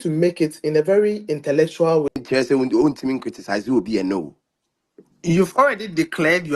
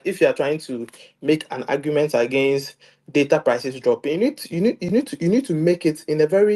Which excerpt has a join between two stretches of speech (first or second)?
first